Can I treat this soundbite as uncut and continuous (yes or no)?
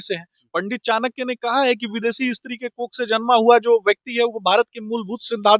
yes